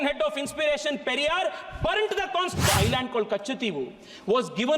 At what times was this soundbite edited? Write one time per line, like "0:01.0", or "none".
0:02.6